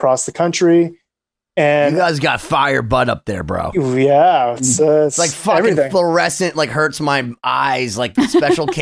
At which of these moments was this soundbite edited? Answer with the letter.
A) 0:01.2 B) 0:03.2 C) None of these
C